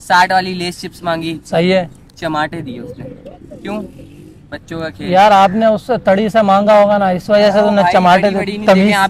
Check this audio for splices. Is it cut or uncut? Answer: uncut